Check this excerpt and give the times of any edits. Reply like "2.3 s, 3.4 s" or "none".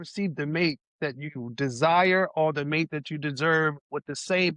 none